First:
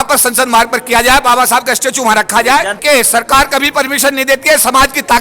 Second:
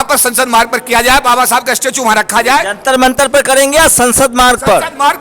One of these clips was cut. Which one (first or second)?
first